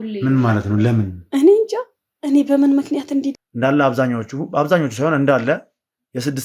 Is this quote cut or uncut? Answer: cut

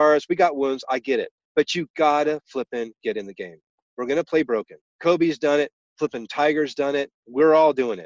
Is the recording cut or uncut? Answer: cut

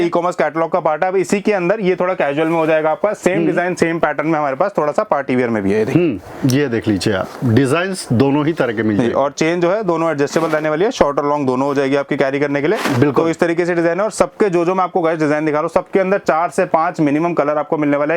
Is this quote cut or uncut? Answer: uncut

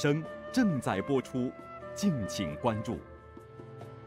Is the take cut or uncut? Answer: cut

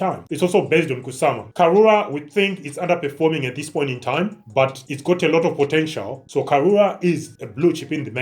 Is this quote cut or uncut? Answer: cut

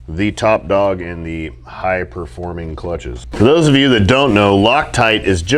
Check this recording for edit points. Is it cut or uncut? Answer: cut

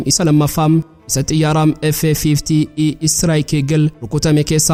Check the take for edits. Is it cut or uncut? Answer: uncut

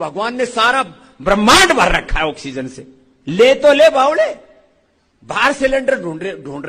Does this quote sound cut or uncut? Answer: uncut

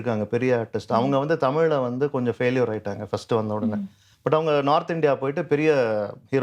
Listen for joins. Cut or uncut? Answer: uncut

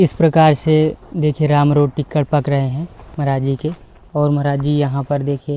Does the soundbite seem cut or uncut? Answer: uncut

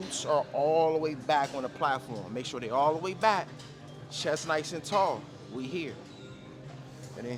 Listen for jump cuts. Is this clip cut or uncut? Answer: uncut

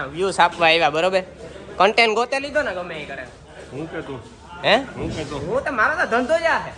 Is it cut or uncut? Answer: uncut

